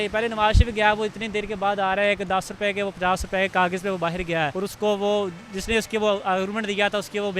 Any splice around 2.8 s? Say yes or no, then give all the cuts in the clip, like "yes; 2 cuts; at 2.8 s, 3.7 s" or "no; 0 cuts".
no; 1 cut; at 4.5 s